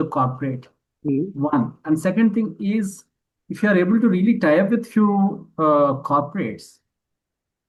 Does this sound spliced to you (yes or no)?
no